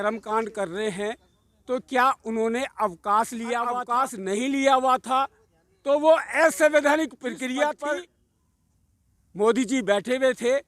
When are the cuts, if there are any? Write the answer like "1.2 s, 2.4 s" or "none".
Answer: 3.9 s, 7.8 s

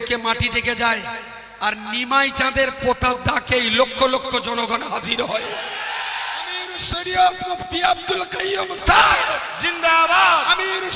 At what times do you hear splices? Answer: 6.7 s

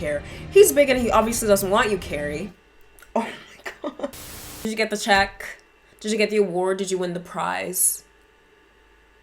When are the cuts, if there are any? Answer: 4.2 s

